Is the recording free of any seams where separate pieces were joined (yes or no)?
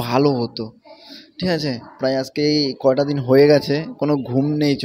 yes